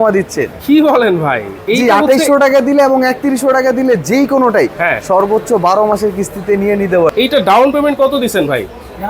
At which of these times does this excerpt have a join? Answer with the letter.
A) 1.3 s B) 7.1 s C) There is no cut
B